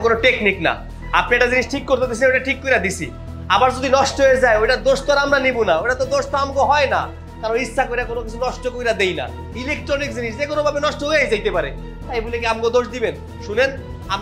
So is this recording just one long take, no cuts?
yes; 0 cuts

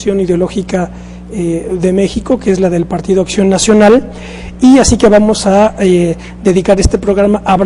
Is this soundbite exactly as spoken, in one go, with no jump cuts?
yes; 0 cuts

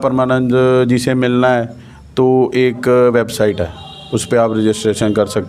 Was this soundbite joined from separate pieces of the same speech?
no; 0 cuts

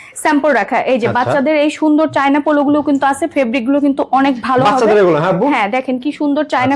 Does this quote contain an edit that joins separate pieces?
no; 0 cuts

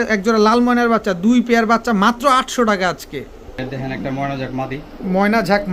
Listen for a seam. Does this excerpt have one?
no; 0 cuts

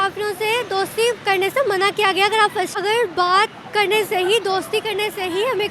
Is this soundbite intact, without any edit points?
no; 1 cut; at 2.7 s

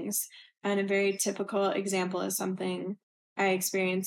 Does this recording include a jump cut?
no; 0 cuts

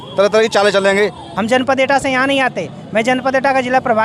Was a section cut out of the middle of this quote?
yes; 1 cut; at 1.3 s

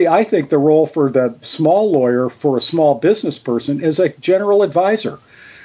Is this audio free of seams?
no; 2 cuts; at 1.5 s, 4.2 s

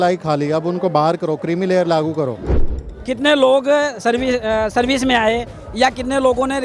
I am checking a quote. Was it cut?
yes; 1 cut; at 2.8 s

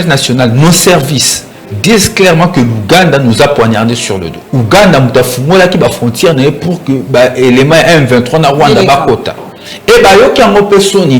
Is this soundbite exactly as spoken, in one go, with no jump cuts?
no; 1 cut; at 4.4 s

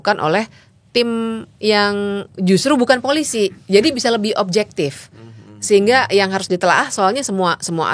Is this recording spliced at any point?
no; 0 cuts

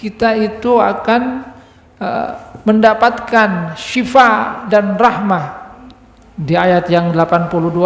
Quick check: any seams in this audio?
no; 0 cuts

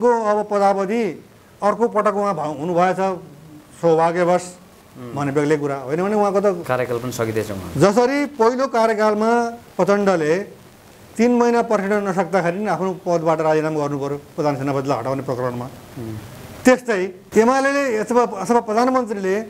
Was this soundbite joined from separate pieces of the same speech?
yes; 2 cuts; at 6.6 s, 17.2 s

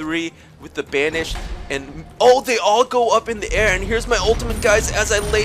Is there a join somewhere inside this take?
no; 0 cuts

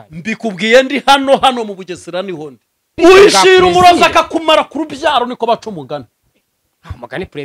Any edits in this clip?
yes; 1 cut; at 2.9 s

